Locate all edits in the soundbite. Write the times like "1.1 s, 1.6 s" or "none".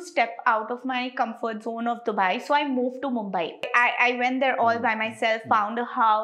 3.7 s